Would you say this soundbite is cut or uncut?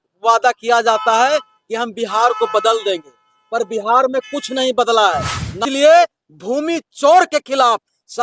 cut